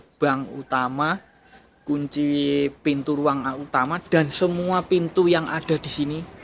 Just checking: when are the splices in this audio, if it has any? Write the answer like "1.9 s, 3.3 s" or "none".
none